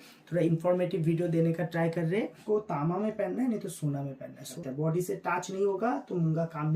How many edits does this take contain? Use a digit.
2